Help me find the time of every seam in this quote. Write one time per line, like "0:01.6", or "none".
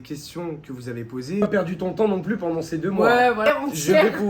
0:01.4
0:03.4